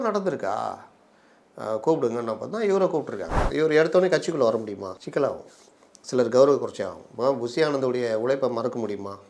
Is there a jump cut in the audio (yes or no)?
yes